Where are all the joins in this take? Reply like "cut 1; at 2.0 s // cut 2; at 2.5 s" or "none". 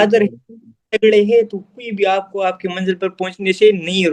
none